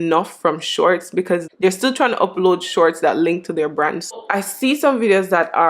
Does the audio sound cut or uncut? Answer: cut